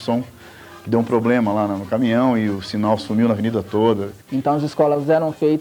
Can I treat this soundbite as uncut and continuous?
no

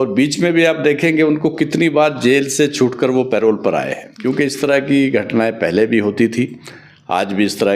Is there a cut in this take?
yes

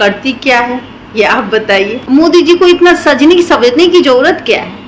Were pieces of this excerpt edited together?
yes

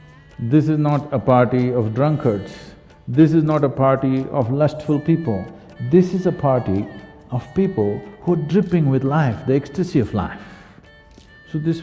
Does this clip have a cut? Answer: no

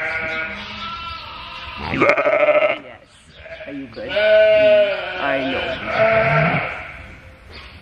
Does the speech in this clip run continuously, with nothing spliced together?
yes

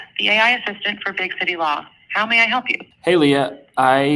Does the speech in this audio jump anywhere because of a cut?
yes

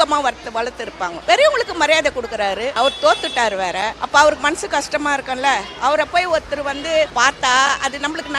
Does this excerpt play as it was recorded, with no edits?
no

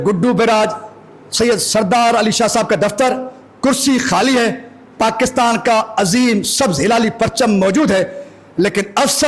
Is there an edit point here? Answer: no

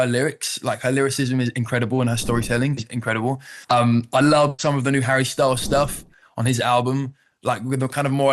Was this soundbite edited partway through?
no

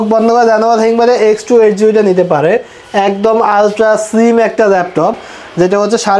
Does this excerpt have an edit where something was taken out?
no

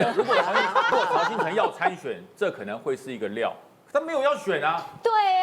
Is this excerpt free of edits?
no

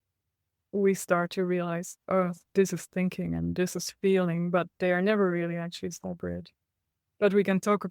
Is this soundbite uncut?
yes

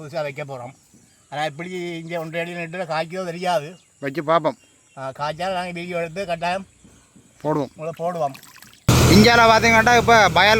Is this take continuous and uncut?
no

